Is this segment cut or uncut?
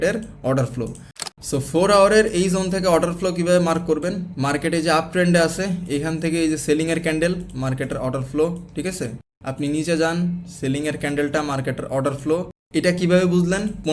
cut